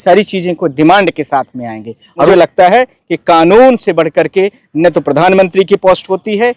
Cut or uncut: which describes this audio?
cut